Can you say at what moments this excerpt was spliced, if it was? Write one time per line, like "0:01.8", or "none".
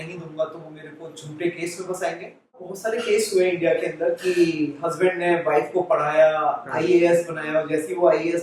0:02.7